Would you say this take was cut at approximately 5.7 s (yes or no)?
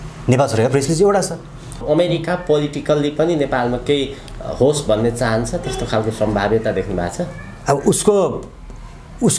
no